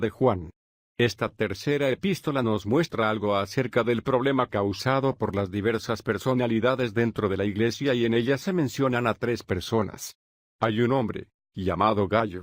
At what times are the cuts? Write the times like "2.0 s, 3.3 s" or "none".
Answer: none